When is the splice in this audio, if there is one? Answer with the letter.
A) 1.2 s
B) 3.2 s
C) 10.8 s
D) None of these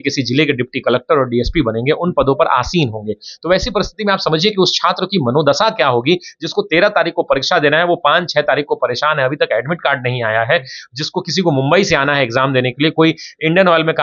D